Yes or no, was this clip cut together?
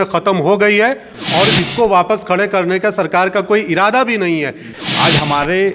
yes